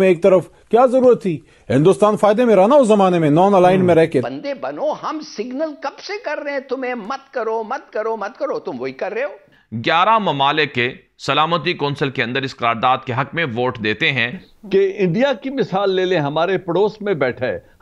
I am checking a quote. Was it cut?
yes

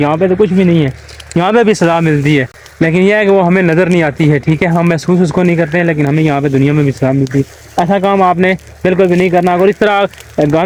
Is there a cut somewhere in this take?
no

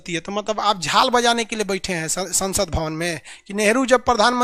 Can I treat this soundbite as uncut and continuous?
yes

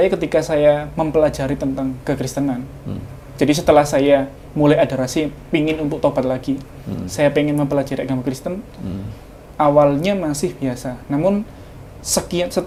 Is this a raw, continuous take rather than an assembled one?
yes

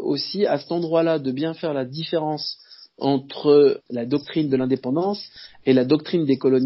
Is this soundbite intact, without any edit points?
no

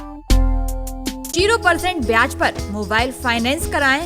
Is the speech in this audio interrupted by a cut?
yes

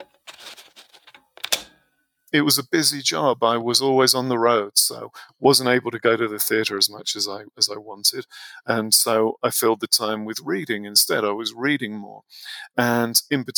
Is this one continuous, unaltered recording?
no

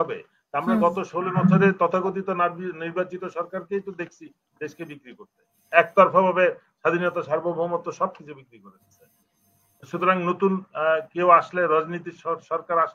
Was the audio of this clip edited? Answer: no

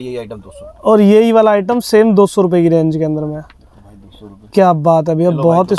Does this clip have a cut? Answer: no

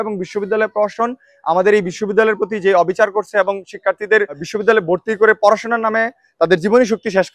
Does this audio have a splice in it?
yes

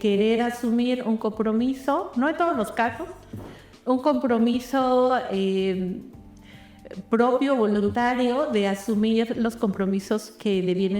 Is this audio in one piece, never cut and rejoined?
yes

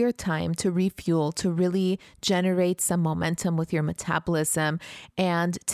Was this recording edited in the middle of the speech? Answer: no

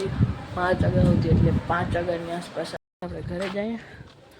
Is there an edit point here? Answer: yes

